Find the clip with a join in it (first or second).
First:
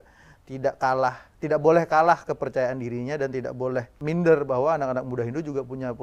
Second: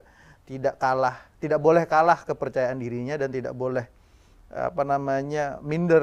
first